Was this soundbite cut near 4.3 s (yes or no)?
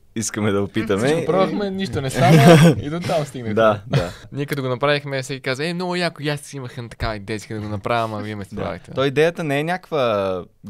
yes